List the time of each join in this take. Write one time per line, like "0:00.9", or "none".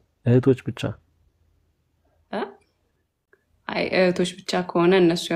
none